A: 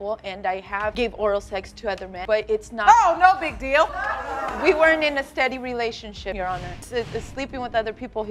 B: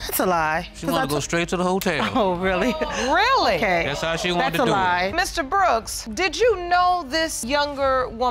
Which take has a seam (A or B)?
A